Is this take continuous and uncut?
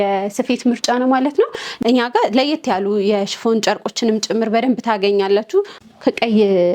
no; 2 cuts; at 1.7 s, 5.8 s

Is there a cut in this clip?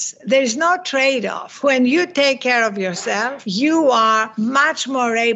yes; 3 cuts; at 1.4 s, 3.4 s, 4.3 s

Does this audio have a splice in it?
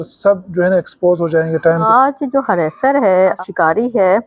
yes; 2 cuts; at 1.9 s, 3.4 s

